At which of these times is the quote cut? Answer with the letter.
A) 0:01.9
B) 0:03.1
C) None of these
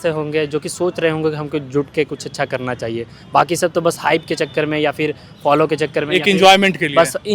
C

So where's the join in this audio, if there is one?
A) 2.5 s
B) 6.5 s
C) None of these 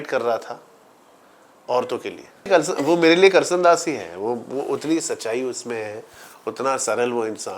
A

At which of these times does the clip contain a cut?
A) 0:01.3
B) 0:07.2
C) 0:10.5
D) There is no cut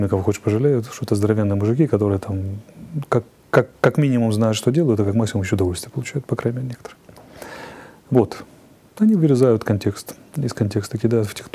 D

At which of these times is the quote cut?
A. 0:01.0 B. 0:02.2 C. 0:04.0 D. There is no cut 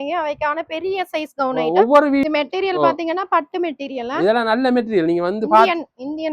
B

